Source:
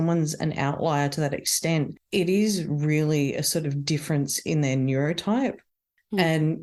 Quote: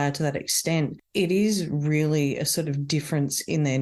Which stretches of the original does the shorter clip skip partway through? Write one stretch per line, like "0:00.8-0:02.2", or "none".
none